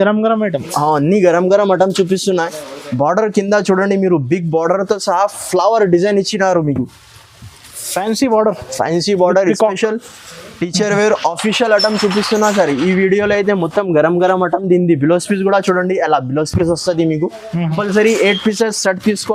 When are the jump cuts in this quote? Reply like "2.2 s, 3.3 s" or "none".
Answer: none